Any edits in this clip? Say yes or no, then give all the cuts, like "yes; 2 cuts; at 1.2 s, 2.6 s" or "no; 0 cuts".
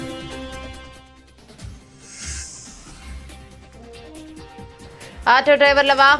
no; 0 cuts